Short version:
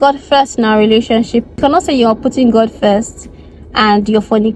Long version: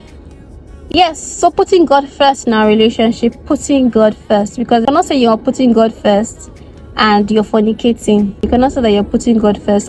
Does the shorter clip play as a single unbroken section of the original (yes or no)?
no